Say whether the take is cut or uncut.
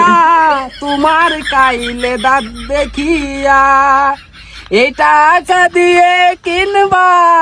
uncut